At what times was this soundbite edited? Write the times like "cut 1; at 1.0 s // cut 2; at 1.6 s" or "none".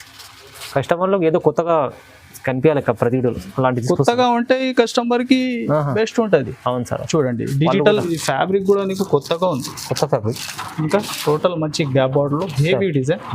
cut 1; at 8.0 s